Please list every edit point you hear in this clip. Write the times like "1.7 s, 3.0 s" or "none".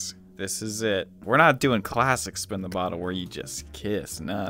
1.2 s